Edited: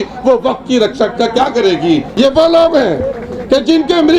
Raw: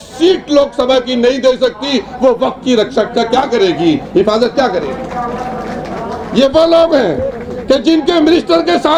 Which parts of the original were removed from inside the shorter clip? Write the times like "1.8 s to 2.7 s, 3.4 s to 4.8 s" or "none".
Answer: 4.1 s to 6.3 s